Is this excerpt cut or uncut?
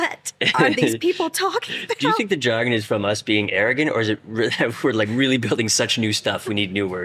uncut